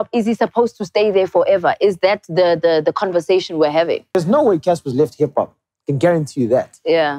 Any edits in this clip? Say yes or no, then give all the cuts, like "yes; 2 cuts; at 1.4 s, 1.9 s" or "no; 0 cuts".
yes; 1 cut; at 4.1 s